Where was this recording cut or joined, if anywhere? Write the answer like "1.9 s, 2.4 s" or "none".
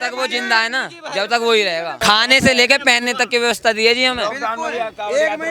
none